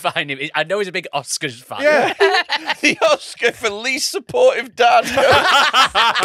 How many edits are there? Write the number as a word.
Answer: one